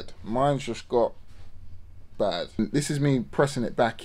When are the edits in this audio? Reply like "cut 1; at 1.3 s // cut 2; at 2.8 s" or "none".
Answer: cut 1; at 2.6 s